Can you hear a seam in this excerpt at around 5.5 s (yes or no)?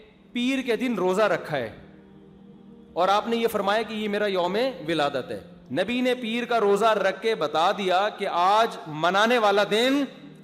yes